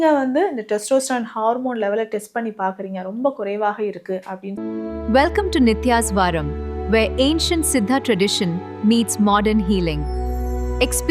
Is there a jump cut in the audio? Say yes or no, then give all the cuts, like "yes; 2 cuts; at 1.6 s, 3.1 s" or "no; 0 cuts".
yes; 1 cut; at 4.5 s